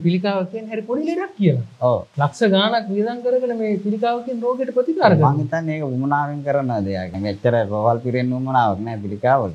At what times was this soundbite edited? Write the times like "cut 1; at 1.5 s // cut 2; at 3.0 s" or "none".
cut 1; at 2.1 s // cut 2; at 7.1 s